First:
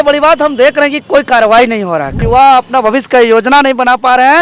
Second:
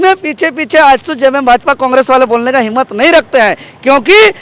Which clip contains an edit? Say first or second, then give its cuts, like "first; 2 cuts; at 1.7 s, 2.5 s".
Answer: first; 1 cut; at 2.2 s